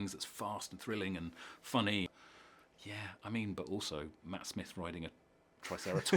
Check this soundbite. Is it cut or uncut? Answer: cut